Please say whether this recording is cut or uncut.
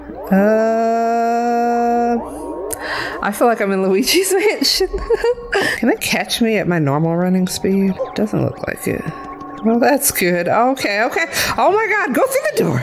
cut